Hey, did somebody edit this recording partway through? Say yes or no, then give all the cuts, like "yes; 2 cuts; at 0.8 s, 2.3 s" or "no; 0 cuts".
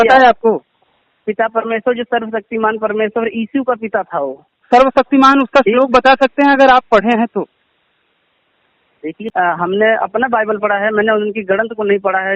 yes; 1 cut; at 9.2 s